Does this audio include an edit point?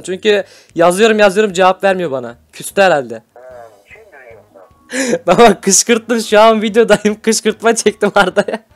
yes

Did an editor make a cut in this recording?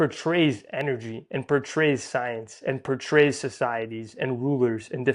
no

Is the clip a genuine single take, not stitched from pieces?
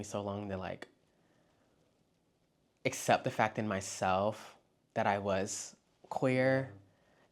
yes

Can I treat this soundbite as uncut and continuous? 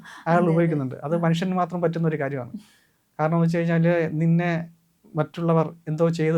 yes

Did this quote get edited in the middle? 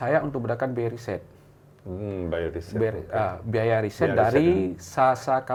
no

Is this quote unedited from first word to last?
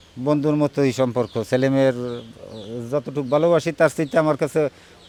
yes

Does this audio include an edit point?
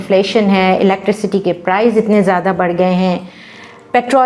no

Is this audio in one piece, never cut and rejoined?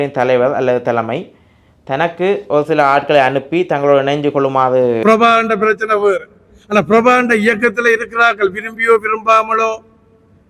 no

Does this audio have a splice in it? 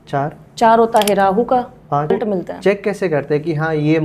yes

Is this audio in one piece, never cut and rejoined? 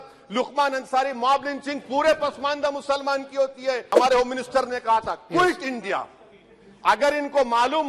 no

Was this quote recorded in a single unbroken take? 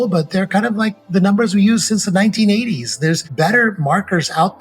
no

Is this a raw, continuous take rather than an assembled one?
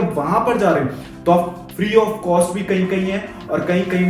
no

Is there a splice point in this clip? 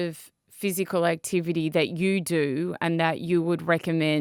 no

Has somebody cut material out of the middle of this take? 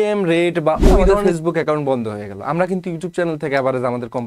yes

